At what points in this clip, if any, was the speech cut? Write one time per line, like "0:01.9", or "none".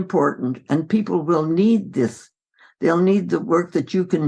none